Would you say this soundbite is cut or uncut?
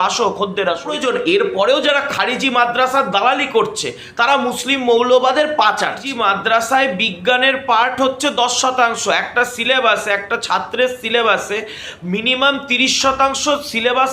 cut